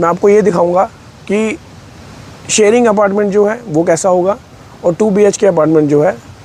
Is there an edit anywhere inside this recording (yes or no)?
no